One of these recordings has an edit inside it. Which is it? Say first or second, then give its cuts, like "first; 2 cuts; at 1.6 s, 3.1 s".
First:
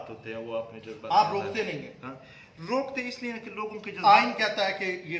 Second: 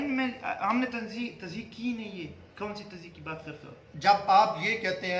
first; 1 cut; at 4.2 s